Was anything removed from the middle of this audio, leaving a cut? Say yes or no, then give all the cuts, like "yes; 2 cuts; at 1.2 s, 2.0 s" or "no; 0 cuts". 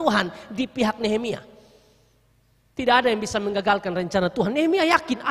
no; 0 cuts